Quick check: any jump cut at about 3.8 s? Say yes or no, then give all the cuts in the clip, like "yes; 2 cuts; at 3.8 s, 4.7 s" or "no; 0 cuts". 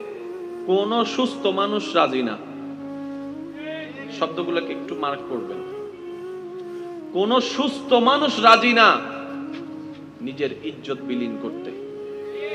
no; 4 cuts; at 5.9 s, 7.1 s, 9.1 s, 10.2 s